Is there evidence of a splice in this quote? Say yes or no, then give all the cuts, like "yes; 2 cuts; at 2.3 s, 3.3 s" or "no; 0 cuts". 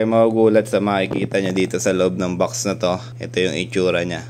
yes; 1 cut; at 3.1 s